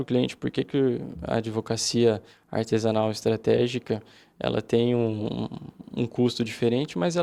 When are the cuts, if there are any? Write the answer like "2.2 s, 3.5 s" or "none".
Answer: none

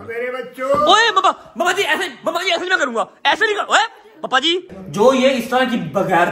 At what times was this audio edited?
4.8 s

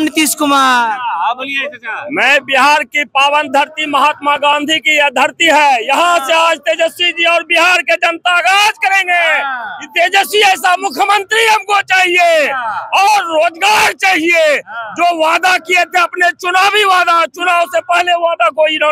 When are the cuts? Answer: none

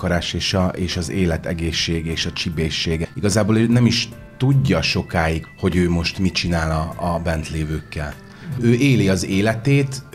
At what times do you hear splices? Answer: 3.0 s, 5.4 s

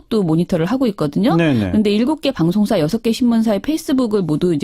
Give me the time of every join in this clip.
3.3 s

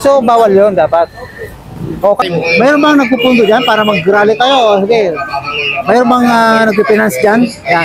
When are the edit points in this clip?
2.2 s

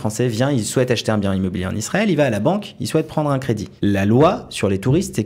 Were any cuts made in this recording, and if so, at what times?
3.7 s

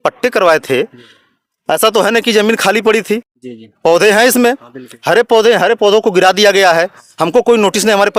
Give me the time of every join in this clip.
none

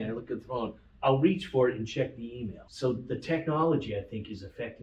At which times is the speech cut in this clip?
2.9 s

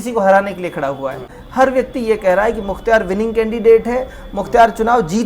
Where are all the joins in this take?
1.2 s

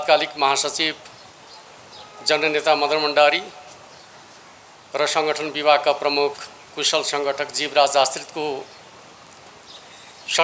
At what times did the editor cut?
none

